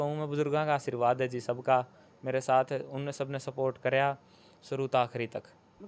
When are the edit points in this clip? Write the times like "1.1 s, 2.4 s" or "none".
none